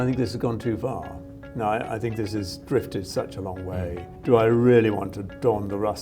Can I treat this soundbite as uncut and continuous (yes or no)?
no